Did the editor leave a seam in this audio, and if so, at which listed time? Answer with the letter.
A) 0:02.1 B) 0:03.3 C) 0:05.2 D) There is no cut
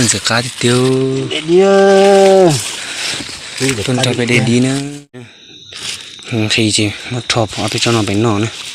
C